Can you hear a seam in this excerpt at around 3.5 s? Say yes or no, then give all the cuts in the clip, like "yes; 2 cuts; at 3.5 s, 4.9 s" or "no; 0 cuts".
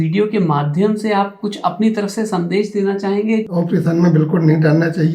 yes; 1 cut; at 3.5 s